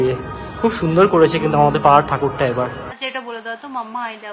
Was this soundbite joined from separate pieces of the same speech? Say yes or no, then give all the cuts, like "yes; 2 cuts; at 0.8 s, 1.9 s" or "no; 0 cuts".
yes; 1 cut; at 2.9 s